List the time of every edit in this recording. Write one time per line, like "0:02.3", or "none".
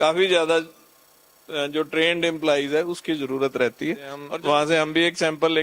0:04.2